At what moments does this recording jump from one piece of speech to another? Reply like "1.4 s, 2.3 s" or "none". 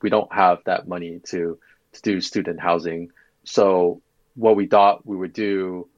none